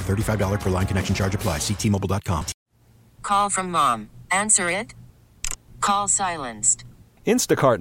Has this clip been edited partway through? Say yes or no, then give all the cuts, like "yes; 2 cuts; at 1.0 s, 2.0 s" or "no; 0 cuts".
yes; 1 cut; at 2.5 s